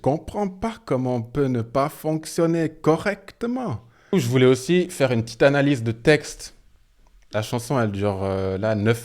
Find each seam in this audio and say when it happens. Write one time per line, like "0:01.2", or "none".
0:04.1